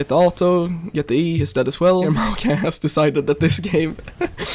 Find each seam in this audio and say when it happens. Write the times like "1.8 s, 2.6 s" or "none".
2.1 s